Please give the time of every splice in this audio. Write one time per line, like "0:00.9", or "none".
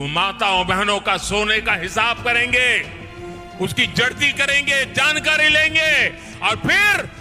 none

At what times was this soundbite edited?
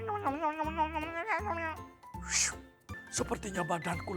0:03.0

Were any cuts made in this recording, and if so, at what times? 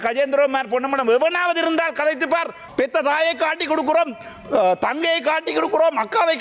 0:02.6

